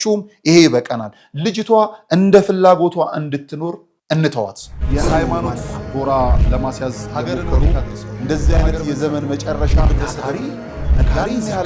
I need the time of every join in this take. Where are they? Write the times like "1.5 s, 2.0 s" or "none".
4.7 s